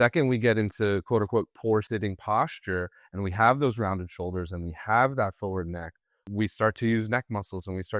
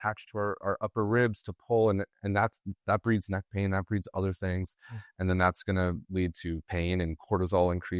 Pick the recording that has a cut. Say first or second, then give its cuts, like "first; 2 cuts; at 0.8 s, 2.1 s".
first; 2 cuts; at 1.9 s, 6.2 s